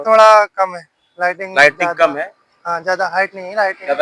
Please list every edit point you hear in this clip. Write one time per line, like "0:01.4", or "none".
none